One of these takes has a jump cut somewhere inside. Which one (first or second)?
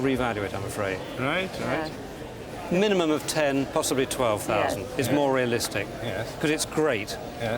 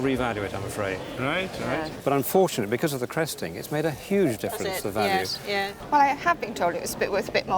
second